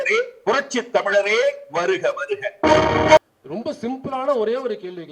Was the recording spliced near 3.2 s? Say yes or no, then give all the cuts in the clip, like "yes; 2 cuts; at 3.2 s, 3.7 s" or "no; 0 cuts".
yes; 1 cut; at 3.2 s